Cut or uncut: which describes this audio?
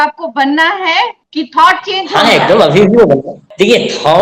uncut